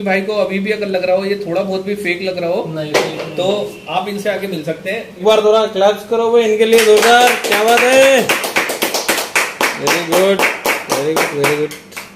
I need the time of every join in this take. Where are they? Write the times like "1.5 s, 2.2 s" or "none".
5.2 s